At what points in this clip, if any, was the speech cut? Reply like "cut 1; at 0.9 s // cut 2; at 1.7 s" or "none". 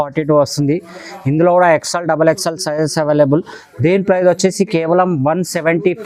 none

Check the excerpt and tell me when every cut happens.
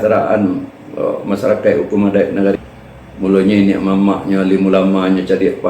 cut 1; at 2.5 s

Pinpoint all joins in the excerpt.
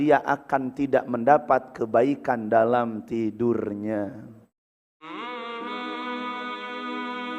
cut 1; at 5.1 s

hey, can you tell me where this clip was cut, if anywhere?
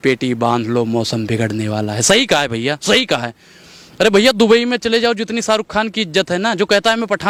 none

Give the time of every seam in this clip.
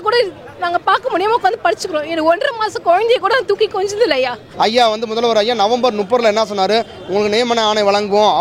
cut 1; at 4.4 s

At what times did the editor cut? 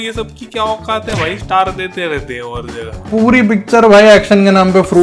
cut 1; at 3.1 s

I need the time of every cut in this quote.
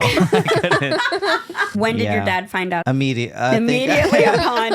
cut 1; at 1.7 s // cut 2; at 2.8 s

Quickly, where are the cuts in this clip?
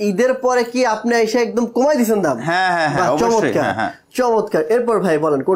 none

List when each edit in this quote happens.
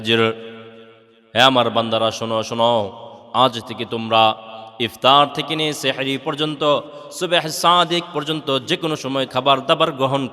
cut 1; at 9.3 s

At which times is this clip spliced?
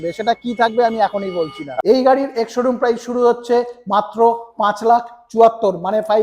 cut 1; at 1.8 s

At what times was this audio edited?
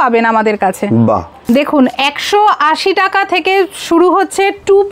cut 1; at 1.3 s

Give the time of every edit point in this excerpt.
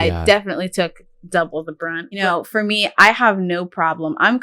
cut 1; at 2.2 s

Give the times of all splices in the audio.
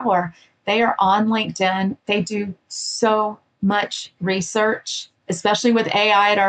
cut 1; at 5.1 s

